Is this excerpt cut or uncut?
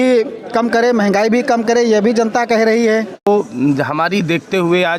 cut